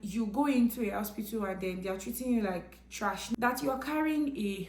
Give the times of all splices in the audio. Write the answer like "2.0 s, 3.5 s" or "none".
3.3 s